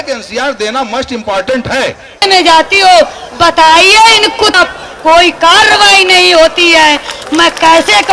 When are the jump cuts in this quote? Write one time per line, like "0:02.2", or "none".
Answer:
0:02.2
0:04.5